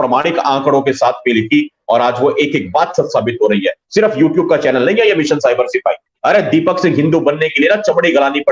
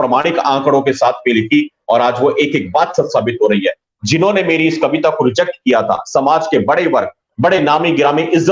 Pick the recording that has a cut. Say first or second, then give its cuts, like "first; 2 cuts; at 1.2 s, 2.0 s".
first; 2 cuts; at 3.8 s, 6.0 s